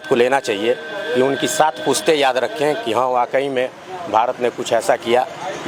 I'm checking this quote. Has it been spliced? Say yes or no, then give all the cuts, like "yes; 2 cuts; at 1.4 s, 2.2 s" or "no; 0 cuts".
no; 0 cuts